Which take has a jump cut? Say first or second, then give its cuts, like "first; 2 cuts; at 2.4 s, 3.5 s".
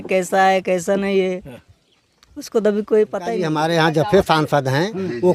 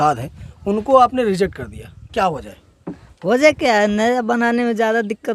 first; 1 cut; at 3.5 s